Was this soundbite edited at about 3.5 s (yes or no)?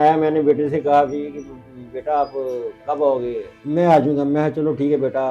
yes